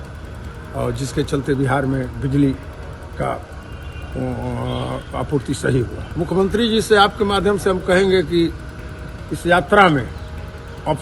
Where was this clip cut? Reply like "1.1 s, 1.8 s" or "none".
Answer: 6.0 s